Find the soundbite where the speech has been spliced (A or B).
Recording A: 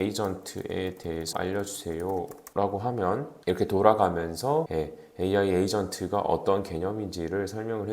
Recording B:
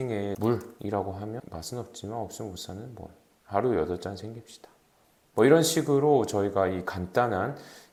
A